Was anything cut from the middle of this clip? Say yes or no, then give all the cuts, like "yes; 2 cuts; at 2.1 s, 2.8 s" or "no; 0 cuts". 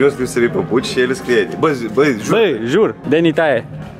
yes; 1 cut; at 3.0 s